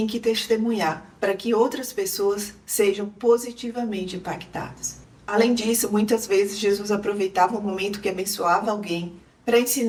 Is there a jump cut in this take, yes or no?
no